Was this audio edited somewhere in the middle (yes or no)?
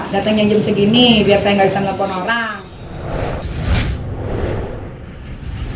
yes